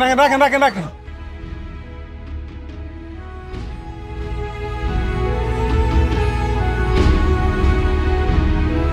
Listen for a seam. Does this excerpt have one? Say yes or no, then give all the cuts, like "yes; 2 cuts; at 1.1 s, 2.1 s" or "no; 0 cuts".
yes; 1 cut; at 1.1 s